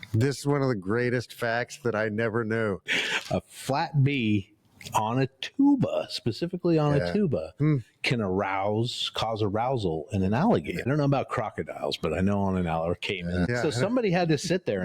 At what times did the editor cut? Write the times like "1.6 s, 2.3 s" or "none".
10.8 s, 13.5 s